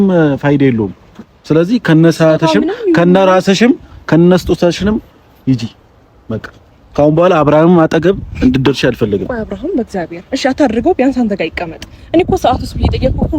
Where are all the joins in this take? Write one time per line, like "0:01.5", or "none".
none